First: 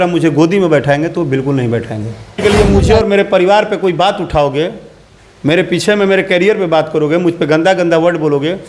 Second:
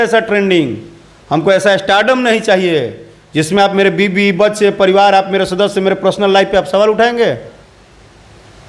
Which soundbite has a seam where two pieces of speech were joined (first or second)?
first